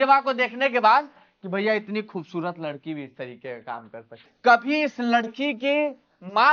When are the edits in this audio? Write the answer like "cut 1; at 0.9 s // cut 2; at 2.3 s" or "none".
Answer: cut 1; at 4.2 s